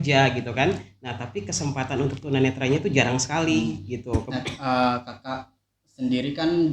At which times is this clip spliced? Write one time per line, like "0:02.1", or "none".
0:04.3